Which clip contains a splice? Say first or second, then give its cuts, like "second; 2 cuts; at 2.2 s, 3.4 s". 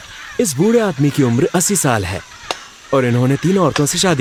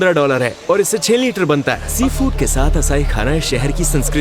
second; 1 cut; at 1.9 s